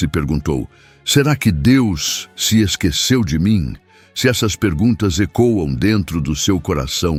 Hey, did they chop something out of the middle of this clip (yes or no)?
no